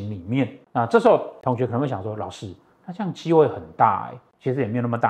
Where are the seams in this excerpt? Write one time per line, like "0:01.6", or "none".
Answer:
0:01.3